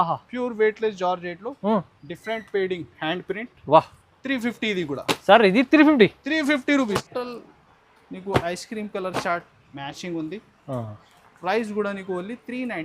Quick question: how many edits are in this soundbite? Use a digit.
1